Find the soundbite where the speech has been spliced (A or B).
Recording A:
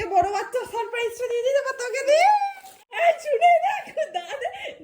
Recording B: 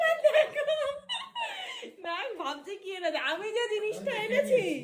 A